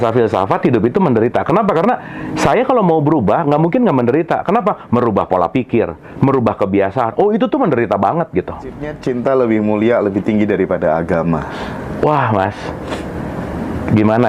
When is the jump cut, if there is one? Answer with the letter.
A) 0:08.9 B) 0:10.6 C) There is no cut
A